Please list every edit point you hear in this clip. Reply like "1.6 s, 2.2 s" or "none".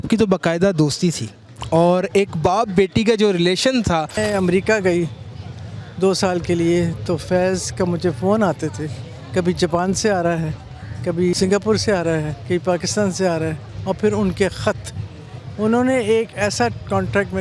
4.2 s, 11.3 s, 12.3 s, 13.7 s